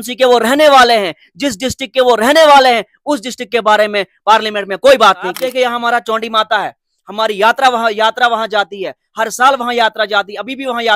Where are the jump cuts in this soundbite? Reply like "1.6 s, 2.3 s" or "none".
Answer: 5.3 s